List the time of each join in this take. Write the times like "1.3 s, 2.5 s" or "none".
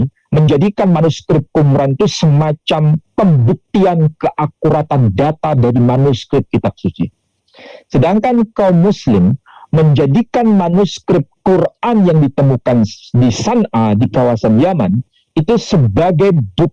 none

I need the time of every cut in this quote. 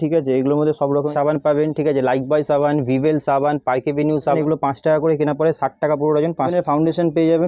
1.1 s, 4.4 s, 6.5 s

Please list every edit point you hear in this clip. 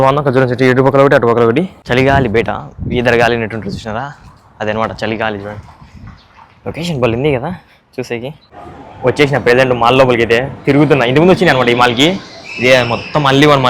1.8 s, 8.9 s

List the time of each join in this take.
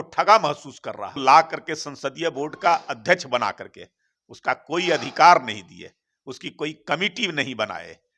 1.2 s

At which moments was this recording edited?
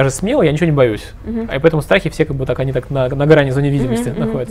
none

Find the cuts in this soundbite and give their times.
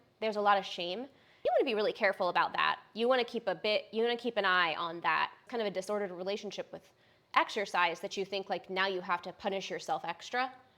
none

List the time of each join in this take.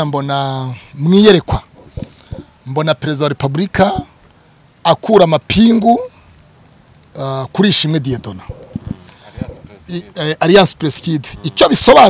none

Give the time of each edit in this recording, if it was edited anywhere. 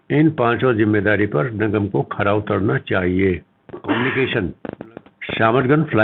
4.0 s

